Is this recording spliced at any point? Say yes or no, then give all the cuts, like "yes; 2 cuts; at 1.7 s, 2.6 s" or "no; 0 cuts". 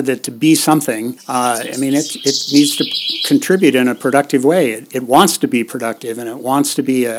yes; 1 cut; at 1.2 s